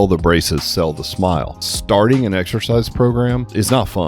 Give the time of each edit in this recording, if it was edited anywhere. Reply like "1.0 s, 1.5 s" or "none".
1.6 s